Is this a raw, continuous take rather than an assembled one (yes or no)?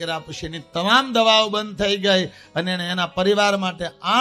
yes